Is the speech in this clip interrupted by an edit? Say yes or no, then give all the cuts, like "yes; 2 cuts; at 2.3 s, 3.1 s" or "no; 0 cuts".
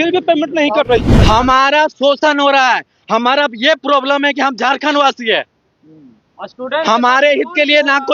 yes; 1 cut; at 1.2 s